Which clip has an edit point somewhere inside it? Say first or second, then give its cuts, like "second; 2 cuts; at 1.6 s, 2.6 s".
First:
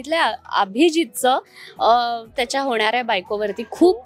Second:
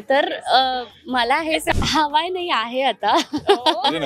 second; 1 cut; at 1.8 s